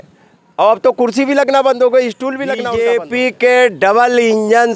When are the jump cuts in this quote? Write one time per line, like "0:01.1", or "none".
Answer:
0:02.6